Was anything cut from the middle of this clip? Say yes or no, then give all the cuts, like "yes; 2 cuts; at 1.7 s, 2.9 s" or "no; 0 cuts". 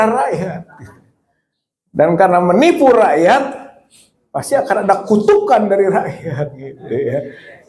yes; 1 cut; at 6.7 s